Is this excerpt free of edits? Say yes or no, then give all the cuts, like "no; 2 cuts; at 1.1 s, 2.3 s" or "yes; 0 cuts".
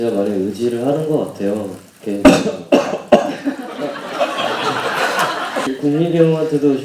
yes; 0 cuts